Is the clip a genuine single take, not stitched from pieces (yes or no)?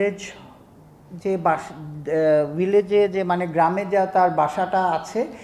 yes